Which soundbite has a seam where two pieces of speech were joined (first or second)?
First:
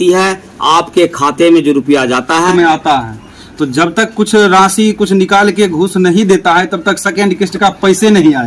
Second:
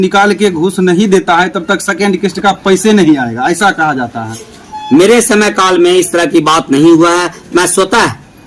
first